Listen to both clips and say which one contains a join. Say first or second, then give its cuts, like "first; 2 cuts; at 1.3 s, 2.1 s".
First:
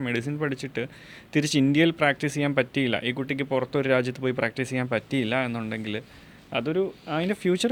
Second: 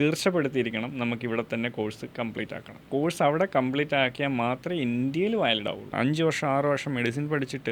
second; 2 cuts; at 2.8 s, 5.9 s